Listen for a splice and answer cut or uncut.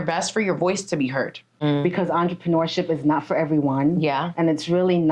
cut